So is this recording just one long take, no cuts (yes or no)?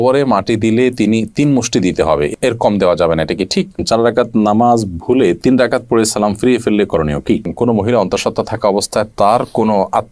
no